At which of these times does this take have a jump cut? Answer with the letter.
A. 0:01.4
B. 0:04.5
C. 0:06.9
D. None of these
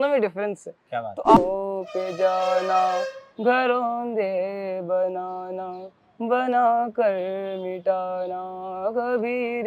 A